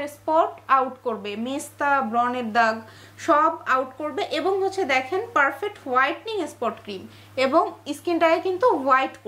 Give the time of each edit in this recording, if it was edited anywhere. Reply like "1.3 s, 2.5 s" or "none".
none